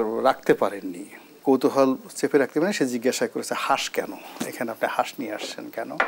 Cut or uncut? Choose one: cut